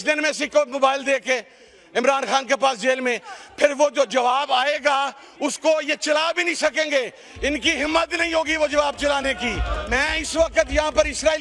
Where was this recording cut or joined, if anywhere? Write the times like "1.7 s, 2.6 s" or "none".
9.8 s

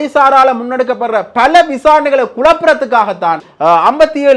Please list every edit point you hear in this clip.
3.5 s

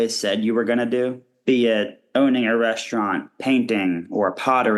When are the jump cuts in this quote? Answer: 1.3 s, 2.0 s, 3.3 s

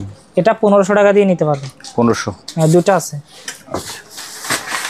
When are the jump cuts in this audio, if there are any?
none

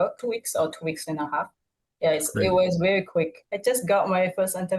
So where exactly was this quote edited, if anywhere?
3.5 s

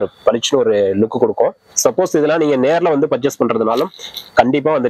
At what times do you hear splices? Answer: 1.7 s

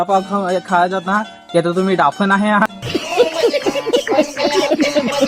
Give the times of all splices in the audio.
2.7 s

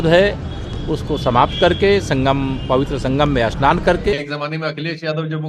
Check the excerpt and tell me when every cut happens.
4.2 s

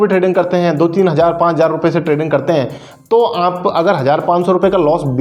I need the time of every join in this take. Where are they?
none

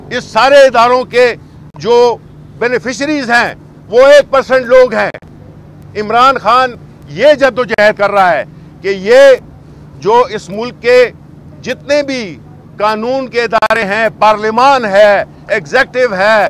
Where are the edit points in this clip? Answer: none

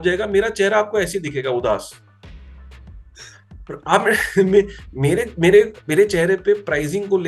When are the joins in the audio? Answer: none

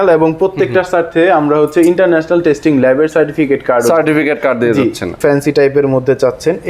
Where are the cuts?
5.1 s

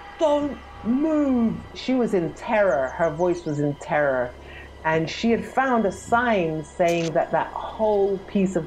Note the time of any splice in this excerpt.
1.7 s

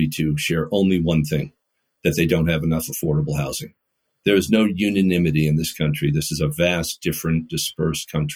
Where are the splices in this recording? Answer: none

